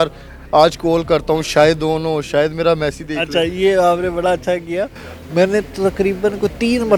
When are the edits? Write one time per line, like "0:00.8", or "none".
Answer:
none

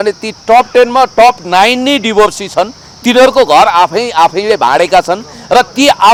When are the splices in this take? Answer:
none

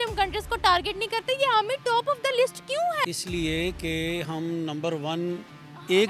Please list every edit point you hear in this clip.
none

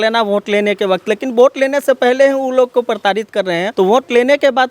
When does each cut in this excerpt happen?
0:03.7

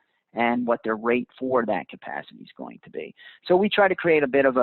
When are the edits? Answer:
none

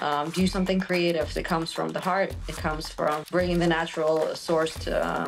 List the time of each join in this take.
0:01.4
0:03.2

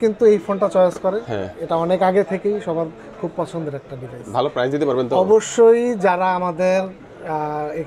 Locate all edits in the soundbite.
none

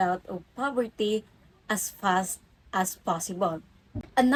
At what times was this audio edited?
none

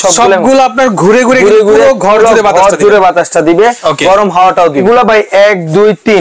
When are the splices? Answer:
0:04.8

